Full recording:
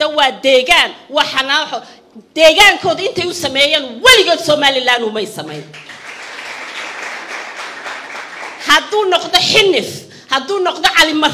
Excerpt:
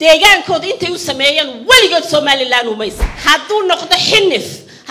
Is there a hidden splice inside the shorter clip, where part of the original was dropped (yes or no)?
yes